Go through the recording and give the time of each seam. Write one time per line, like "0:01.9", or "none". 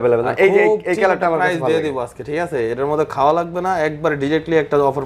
none